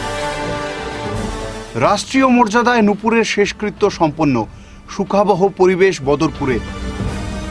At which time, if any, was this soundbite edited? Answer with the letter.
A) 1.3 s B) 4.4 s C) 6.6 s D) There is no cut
A